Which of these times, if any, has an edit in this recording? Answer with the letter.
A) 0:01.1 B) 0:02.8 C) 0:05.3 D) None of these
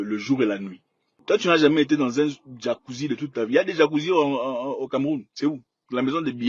A